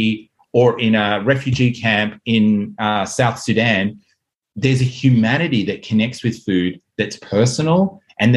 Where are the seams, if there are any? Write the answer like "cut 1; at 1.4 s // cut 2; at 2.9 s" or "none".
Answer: none